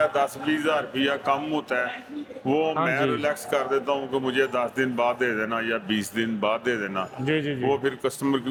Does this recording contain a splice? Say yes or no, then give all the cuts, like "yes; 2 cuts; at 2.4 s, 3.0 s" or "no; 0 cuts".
no; 0 cuts